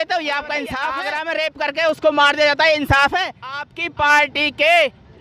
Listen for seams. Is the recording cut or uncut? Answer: cut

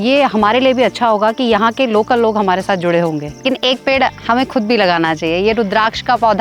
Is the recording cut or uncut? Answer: cut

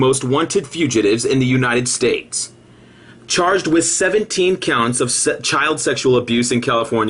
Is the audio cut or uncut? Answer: cut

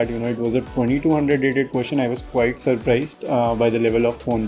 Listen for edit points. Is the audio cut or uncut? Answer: uncut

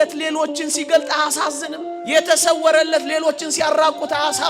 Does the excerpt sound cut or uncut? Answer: uncut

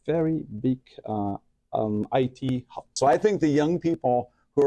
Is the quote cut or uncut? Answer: cut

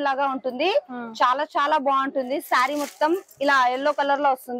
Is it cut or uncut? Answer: uncut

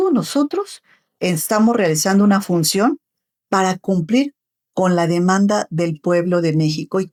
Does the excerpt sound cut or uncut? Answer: uncut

